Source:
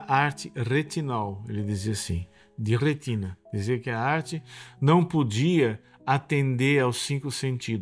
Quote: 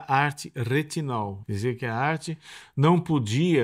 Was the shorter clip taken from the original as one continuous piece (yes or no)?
no